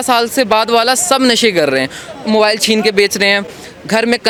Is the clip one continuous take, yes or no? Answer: yes